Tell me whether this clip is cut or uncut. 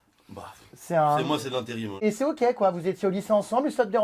cut